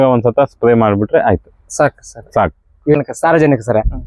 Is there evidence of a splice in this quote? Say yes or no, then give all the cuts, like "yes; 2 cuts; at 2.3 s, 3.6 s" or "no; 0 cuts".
yes; 1 cut; at 3.0 s